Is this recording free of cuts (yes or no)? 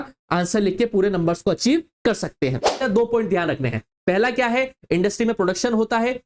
no